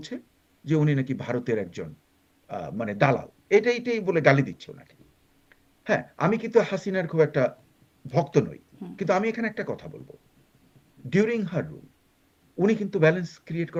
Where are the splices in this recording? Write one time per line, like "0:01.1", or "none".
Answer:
none